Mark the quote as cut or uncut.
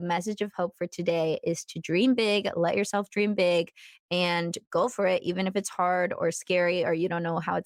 uncut